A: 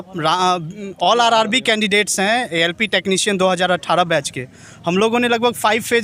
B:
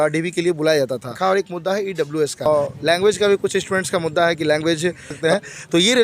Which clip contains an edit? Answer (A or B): B